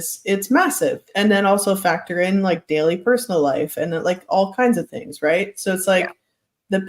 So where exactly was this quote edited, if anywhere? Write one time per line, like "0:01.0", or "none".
0:01.1